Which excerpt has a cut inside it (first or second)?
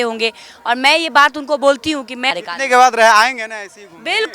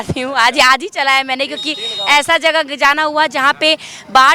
first